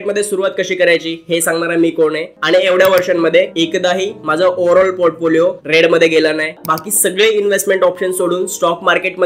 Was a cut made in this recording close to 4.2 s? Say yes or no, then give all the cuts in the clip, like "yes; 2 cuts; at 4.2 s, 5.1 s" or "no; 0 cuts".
no; 2 cuts; at 2.3 s, 6.6 s